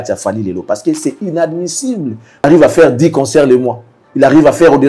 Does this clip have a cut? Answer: yes; 1 cut; at 2.4 s

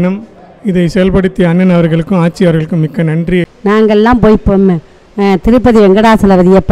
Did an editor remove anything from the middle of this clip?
yes; 1 cut; at 3.5 s

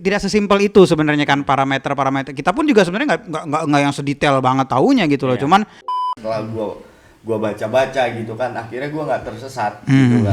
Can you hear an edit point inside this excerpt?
yes; 1 cut; at 6.1 s

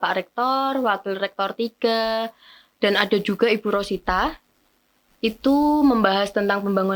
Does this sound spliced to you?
no; 0 cuts

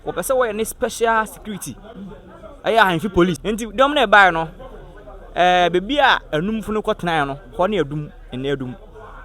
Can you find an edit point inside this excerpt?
yes; 1 cut; at 3.4 s

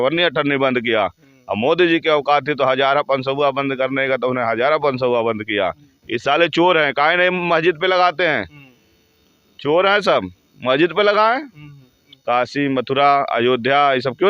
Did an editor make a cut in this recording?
yes; 2 cuts; at 5.9 s, 12.1 s

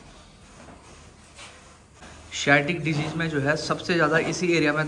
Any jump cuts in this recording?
yes; 1 cut; at 1.9 s

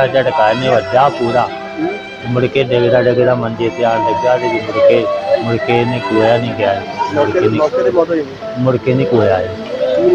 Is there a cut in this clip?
no; 0 cuts

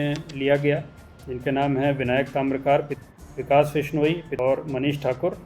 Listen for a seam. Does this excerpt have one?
yes; 2 cuts; at 2.9 s, 4.3 s

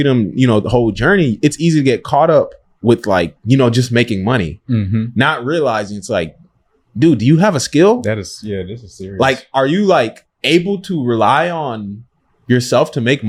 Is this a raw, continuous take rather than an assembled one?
yes; 0 cuts

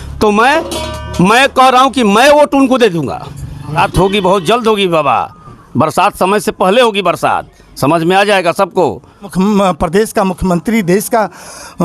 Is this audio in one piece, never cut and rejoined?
no; 2 cuts; at 3.7 s, 9.3 s

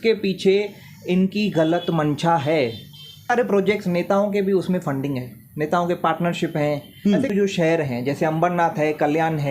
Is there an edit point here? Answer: yes; 2 cuts; at 3.3 s, 7.3 s

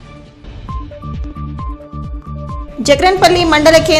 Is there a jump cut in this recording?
yes; 1 cut; at 1.2 s

